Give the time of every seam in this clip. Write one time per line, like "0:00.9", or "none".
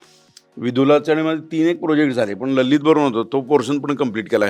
none